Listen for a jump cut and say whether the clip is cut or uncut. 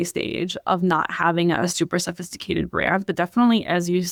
uncut